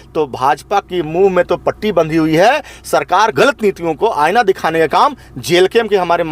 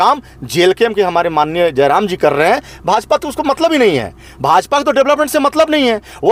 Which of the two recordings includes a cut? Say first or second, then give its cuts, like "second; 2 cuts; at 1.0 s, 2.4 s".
first; 1 cut; at 3.3 s